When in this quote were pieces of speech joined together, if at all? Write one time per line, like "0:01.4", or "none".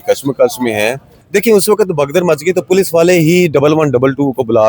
0:01.1